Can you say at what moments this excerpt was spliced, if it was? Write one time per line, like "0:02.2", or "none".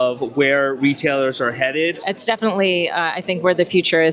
0:02.1